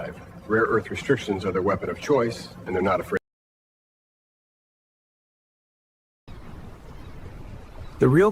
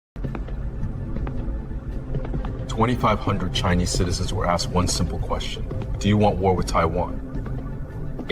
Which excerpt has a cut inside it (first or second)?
second